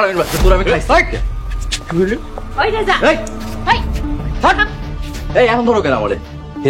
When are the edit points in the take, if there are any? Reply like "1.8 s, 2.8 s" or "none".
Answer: none